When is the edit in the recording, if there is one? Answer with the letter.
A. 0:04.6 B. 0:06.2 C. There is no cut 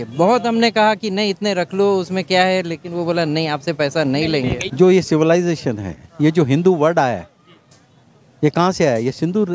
A